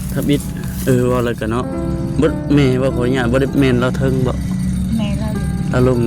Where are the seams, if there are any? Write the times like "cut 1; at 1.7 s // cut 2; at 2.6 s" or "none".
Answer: none